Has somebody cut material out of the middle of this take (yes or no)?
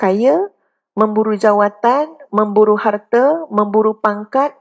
no